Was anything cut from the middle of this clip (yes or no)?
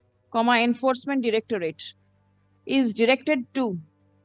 no